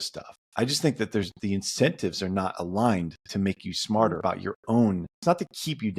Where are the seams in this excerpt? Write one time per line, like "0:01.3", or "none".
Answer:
0:04.2
0:05.1